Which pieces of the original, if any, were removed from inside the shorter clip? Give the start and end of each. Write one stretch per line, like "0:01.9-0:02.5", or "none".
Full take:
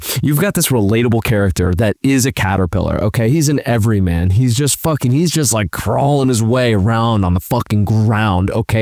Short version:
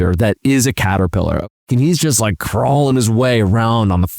0:03.1-0:04.9